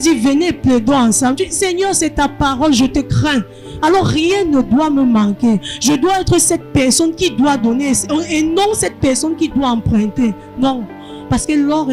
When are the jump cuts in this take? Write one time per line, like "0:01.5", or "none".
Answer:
none